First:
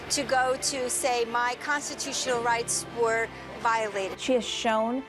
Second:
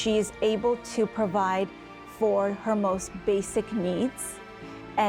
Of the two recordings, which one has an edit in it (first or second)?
first